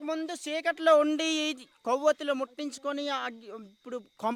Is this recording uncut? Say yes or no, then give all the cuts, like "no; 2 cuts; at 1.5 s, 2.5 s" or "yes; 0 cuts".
yes; 0 cuts